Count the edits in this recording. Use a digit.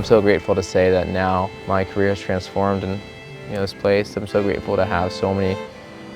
1